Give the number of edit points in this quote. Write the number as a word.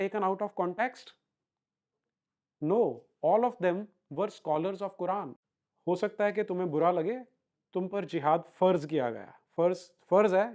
one